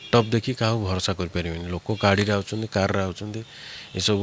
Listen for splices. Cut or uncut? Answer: uncut